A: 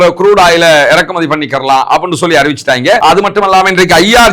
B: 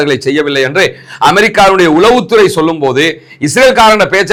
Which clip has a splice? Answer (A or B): A